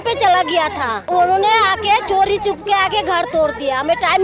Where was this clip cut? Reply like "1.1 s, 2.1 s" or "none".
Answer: 1.1 s